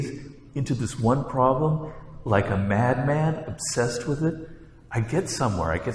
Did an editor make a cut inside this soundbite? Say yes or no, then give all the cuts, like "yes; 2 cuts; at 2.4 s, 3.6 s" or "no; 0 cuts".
no; 0 cuts